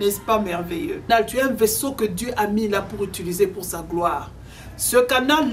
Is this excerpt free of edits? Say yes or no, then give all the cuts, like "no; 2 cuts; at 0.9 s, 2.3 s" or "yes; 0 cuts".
no; 1 cut; at 1.1 s